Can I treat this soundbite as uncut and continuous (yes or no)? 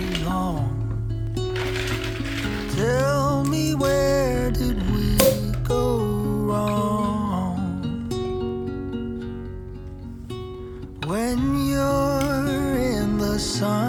yes